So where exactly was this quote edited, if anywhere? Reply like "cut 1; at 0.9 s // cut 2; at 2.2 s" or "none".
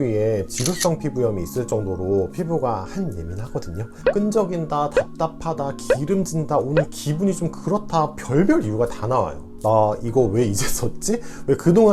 cut 1; at 3.9 s // cut 2; at 9.5 s